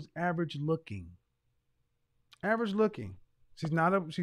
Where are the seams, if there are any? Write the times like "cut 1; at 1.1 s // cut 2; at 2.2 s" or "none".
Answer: none